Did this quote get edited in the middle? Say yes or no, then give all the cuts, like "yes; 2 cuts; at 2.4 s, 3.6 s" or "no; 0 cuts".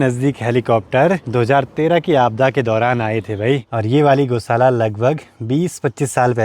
yes; 2 cuts; at 1.2 s, 3.7 s